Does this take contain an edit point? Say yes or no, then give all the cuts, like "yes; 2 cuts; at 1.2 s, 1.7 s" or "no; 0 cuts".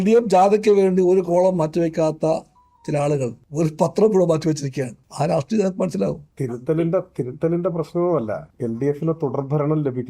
yes; 4 cuts; at 3.4 s, 5.0 s, 6.3 s, 8.5 s